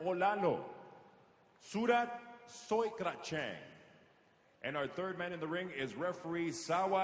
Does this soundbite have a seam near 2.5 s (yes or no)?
yes